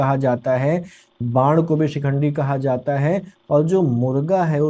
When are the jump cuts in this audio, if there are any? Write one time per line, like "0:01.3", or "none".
none